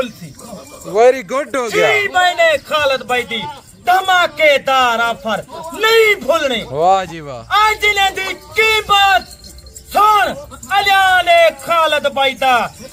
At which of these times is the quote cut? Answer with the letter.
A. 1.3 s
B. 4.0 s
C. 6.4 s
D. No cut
D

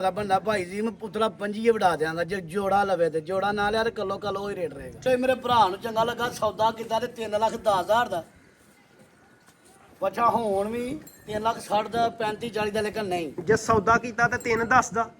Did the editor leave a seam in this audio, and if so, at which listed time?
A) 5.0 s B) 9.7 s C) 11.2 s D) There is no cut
A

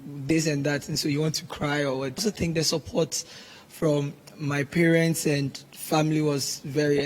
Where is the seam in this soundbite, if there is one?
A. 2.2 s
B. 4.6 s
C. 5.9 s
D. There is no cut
A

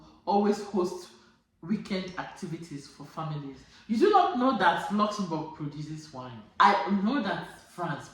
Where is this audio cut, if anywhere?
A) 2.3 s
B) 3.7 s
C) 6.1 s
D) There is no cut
B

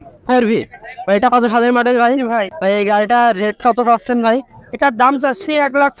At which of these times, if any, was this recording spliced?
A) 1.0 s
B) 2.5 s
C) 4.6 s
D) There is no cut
B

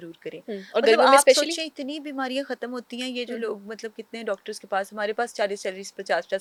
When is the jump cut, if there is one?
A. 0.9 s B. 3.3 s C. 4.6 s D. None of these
D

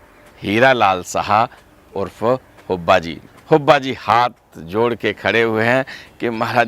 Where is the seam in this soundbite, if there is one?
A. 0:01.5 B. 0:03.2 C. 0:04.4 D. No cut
B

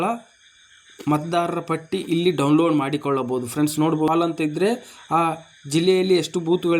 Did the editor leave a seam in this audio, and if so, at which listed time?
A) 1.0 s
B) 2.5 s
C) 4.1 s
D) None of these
C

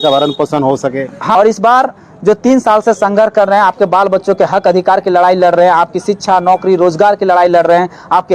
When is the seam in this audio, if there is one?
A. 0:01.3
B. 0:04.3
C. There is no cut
A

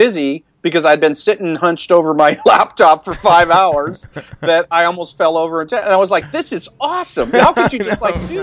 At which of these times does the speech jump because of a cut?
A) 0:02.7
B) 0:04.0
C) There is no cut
C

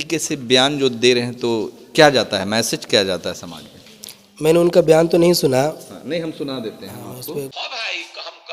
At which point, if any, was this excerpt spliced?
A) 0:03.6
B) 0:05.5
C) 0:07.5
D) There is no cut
C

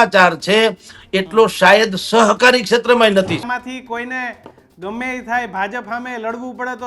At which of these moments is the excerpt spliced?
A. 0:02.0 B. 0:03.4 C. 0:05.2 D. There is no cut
B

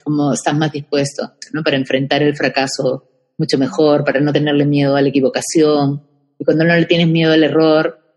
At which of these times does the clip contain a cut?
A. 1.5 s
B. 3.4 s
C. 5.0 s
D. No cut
A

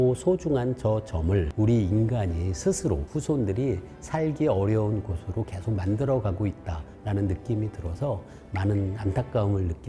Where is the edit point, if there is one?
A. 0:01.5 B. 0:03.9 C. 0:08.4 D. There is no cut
A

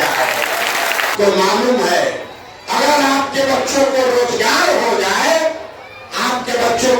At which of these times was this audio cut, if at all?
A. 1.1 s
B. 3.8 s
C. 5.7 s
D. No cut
A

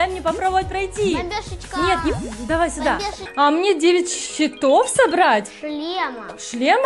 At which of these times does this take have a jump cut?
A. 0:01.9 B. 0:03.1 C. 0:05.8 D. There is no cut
B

